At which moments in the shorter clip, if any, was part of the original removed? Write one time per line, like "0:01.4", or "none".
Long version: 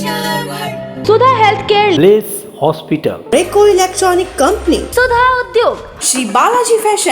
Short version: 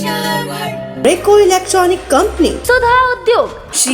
0:00.9